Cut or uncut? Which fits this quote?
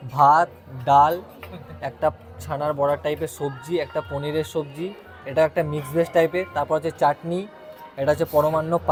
uncut